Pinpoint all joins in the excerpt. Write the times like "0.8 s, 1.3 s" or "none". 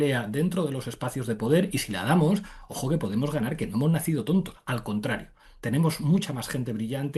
none